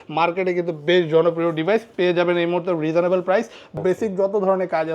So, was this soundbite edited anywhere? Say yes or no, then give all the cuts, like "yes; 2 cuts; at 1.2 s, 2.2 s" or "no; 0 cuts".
yes; 1 cut; at 3.7 s